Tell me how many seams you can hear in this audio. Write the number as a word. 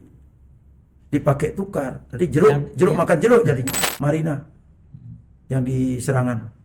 one